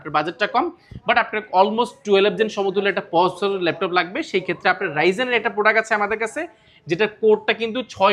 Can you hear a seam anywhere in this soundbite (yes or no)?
no